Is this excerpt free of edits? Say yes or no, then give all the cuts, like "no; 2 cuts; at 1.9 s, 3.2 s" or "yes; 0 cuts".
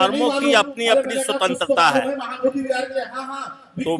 yes; 0 cuts